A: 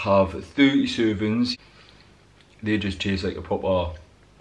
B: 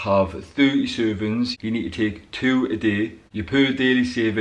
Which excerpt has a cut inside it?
A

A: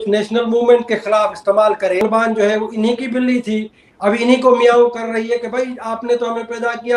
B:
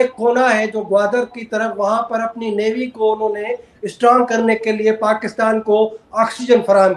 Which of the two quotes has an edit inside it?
A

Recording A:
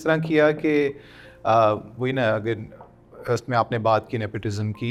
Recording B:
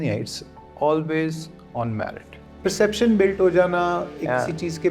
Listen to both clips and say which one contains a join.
B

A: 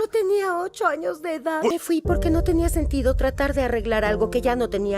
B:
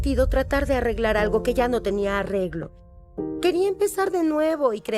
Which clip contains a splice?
A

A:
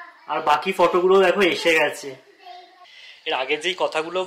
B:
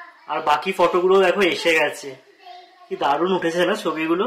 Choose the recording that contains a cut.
A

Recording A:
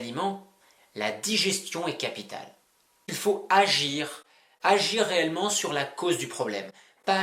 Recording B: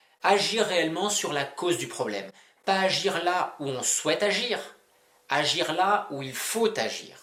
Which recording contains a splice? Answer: A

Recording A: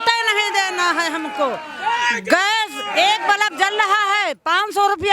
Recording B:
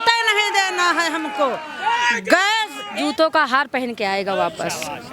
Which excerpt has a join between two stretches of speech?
B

